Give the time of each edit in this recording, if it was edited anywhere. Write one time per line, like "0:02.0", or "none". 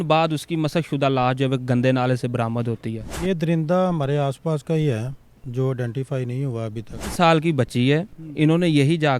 0:03.1
0:07.1